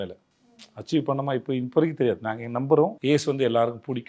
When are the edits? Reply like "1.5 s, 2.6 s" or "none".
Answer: 3.0 s